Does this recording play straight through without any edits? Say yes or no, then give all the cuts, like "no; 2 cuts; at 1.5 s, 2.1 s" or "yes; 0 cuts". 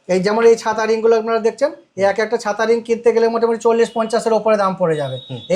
yes; 0 cuts